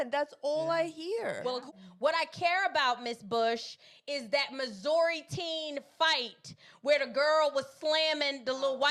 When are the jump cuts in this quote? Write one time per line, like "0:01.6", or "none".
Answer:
0:01.7